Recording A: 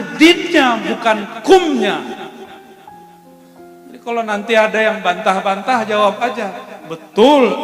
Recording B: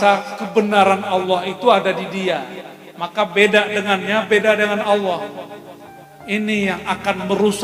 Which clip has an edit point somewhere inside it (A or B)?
A